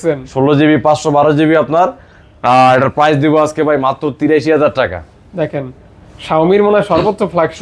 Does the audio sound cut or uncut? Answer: uncut